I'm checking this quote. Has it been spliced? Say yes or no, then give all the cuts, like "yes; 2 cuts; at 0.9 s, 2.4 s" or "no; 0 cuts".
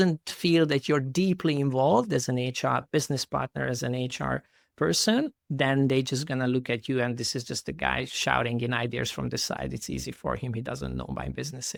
no; 0 cuts